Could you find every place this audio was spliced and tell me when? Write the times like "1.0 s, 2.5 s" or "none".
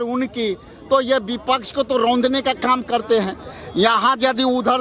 none